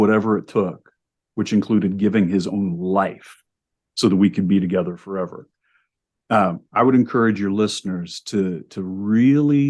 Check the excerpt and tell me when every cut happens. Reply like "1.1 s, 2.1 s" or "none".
none